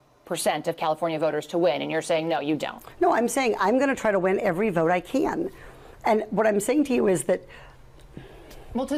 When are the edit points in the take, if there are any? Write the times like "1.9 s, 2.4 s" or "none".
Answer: none